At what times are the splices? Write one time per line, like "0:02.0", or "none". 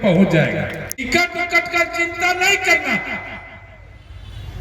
0:01.1